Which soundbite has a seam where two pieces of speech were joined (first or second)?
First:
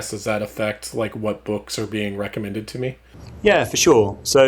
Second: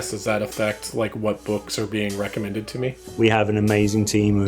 second